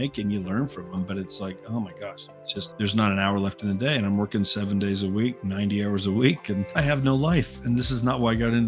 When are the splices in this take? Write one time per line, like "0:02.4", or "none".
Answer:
0:02.7
0:06.7